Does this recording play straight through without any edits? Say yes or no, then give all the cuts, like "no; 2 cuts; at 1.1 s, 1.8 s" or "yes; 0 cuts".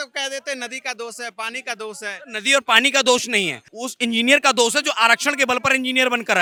yes; 0 cuts